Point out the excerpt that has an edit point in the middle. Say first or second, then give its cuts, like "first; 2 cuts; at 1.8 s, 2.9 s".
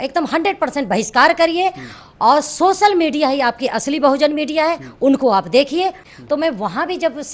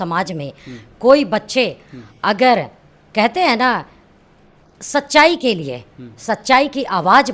first; 1 cut; at 6.0 s